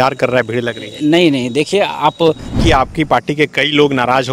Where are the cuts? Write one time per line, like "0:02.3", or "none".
0:02.6